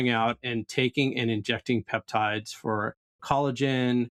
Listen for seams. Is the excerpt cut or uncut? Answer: uncut